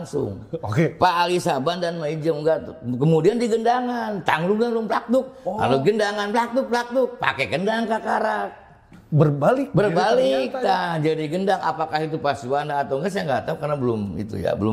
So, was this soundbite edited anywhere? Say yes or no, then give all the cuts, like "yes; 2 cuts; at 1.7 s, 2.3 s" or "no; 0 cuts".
no; 0 cuts